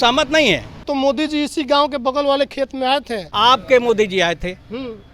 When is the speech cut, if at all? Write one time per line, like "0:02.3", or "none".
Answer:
0:00.8
0:03.2